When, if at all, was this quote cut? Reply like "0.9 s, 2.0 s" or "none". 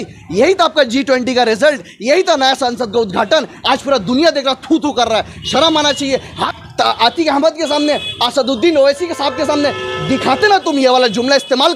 6.4 s